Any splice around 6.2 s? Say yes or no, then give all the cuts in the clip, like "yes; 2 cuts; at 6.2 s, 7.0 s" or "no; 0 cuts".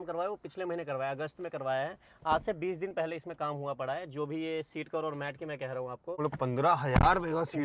yes; 1 cut; at 6.2 s